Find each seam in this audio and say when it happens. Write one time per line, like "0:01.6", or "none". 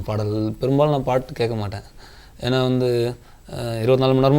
none